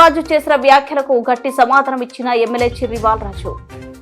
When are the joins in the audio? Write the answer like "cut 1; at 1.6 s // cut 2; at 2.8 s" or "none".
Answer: none